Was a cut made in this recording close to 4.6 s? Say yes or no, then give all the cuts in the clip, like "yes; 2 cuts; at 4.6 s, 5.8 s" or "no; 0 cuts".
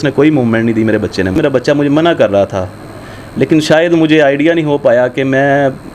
no; 1 cut; at 1.3 s